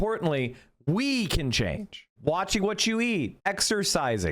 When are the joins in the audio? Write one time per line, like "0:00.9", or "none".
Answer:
0:02.1
0:03.3